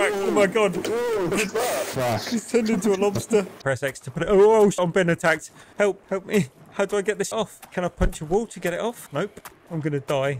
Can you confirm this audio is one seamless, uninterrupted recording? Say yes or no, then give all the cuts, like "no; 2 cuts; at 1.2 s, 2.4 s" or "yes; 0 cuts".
no; 5 cuts; at 1.3 s, 3.5 s, 4.8 s, 7.3 s, 9.5 s